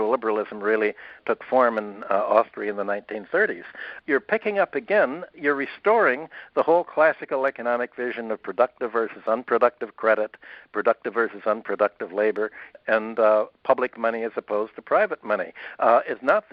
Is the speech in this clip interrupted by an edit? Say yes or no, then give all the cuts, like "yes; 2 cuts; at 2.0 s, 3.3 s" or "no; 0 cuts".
yes; 4 cuts; at 1.2 s, 3.9 s, 5.3 s, 12.7 s